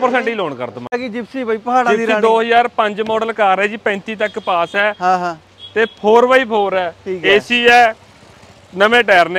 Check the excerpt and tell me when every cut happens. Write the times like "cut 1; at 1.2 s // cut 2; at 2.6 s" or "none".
cut 1; at 1.0 s